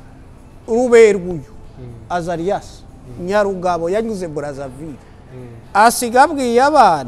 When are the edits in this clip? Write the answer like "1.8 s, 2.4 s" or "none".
none